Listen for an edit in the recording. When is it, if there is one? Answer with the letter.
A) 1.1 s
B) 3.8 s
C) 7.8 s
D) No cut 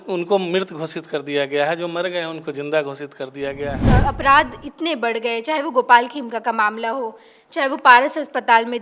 B